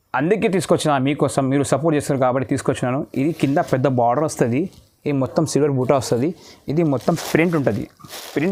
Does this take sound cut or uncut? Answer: uncut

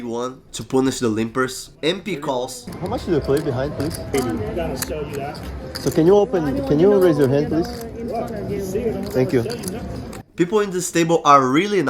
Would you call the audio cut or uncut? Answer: cut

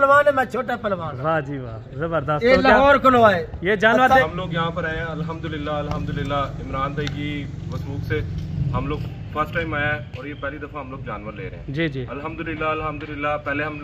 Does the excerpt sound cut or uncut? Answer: cut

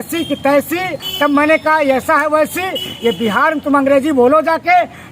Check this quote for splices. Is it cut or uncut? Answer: cut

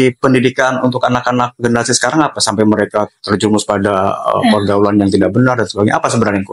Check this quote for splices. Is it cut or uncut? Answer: uncut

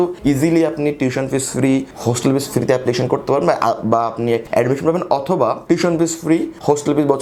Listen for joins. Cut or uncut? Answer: uncut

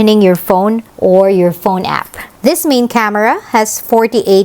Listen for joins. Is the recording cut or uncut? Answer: cut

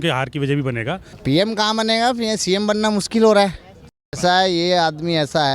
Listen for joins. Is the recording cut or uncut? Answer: cut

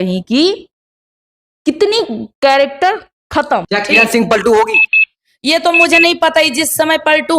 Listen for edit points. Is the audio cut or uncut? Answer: cut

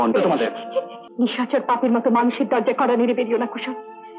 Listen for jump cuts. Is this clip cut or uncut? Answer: cut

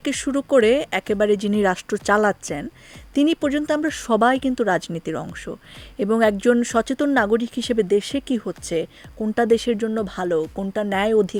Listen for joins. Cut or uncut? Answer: uncut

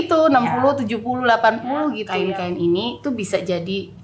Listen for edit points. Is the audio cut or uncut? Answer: cut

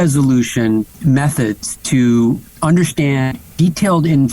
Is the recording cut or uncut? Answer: cut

